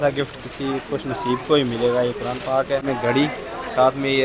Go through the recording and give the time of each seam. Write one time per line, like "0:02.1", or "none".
0:02.8